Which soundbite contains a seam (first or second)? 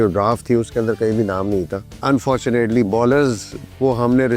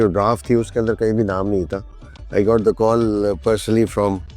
first